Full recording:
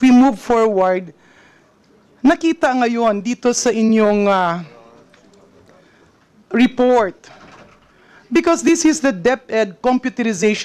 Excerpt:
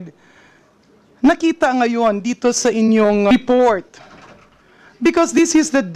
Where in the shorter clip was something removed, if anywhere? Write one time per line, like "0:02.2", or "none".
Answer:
0:03.3